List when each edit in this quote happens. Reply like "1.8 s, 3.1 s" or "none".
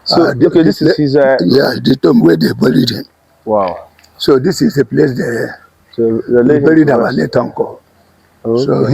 none